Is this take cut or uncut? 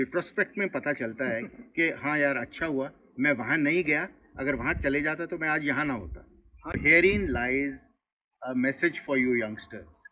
cut